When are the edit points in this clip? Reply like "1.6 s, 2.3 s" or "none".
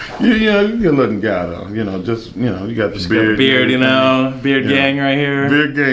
none